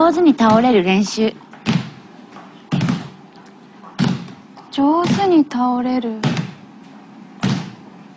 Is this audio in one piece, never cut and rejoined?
no; 1 cut; at 1.5 s

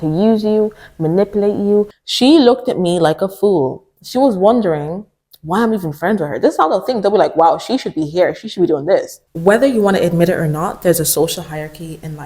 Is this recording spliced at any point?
yes; 2 cuts; at 1.9 s, 9.2 s

